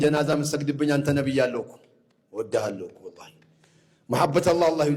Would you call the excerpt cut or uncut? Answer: uncut